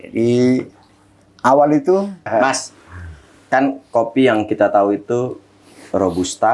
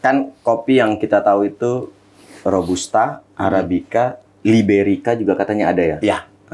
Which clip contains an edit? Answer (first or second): first